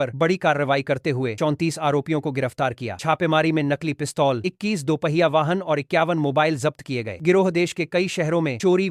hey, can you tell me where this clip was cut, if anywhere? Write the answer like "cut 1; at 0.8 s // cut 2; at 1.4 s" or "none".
none